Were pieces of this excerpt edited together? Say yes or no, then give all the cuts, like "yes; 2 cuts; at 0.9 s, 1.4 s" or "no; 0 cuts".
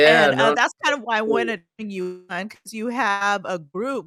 no; 0 cuts